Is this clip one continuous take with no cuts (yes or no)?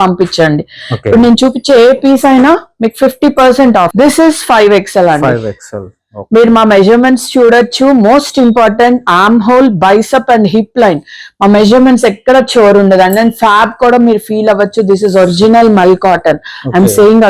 no